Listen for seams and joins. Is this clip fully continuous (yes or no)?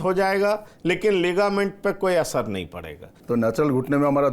no